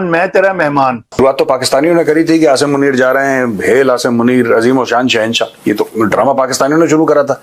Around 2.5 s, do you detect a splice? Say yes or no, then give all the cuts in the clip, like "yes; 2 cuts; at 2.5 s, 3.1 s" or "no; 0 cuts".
no; 1 cut; at 1.2 s